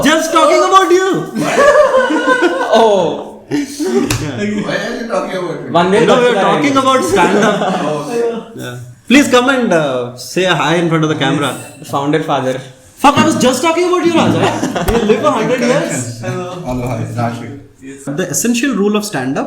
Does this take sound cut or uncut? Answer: cut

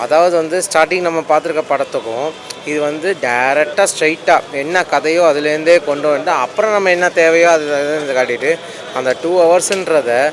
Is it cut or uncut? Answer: uncut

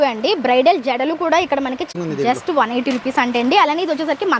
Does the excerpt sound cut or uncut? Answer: cut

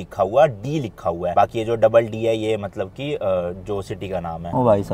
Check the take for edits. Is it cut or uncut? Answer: uncut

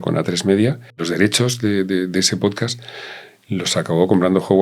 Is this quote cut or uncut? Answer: cut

